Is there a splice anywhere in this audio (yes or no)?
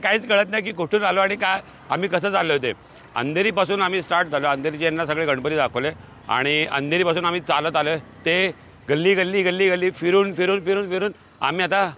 no